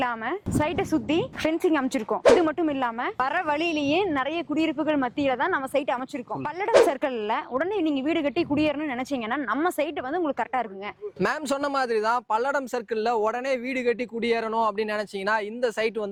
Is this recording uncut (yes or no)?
yes